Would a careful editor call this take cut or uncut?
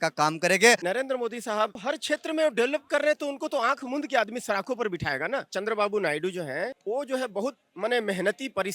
cut